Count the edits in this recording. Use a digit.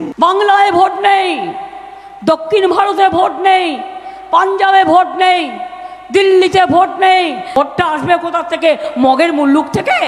1